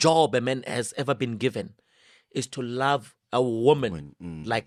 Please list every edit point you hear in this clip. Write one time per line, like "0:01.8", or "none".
none